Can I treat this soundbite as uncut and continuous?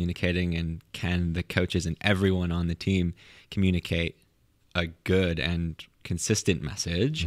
yes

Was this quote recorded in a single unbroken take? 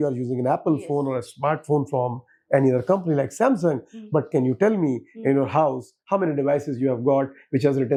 yes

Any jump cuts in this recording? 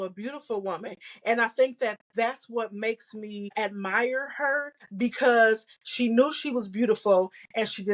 yes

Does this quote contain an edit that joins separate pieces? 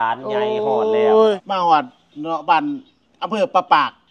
yes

